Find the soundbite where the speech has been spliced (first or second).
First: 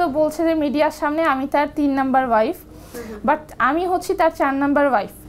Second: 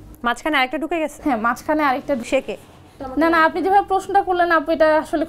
second